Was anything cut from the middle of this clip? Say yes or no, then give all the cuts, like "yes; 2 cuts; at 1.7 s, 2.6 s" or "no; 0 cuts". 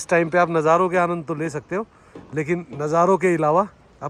no; 0 cuts